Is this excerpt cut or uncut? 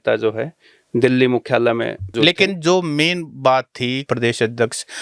cut